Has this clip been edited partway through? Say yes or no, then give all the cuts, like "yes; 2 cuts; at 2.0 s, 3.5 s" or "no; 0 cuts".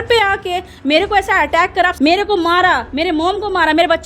yes; 1 cut; at 1.9 s